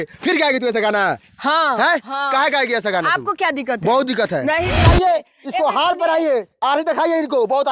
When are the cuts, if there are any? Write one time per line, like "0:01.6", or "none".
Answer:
0:04.8